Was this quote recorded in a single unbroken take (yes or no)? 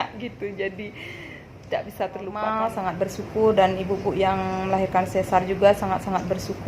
no